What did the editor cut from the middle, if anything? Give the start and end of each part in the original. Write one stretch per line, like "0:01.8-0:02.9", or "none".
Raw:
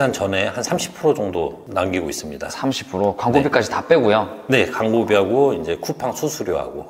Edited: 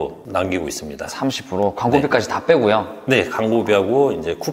none